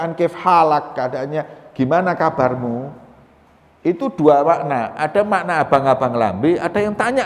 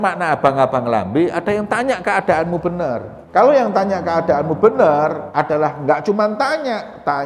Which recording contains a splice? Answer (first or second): second